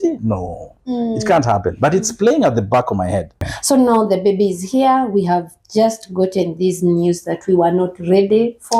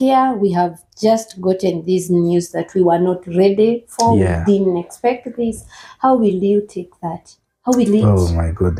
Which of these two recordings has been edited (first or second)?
first